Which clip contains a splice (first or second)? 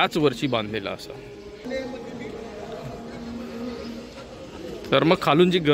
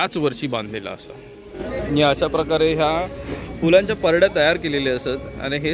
second